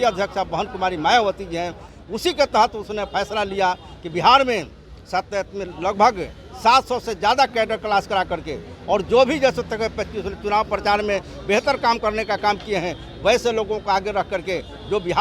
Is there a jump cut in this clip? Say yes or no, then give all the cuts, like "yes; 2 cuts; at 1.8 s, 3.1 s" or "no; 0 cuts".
yes; 1 cut; at 2.0 s